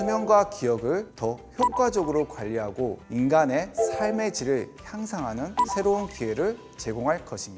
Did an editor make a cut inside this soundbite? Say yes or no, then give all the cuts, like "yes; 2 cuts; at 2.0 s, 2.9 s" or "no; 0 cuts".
no; 0 cuts